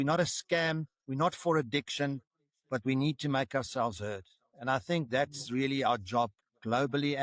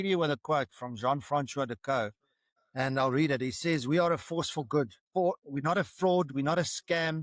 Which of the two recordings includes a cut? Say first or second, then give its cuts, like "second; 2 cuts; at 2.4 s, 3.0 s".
second; 1 cut; at 5.1 s